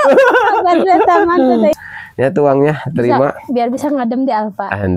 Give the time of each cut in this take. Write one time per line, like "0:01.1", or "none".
0:01.8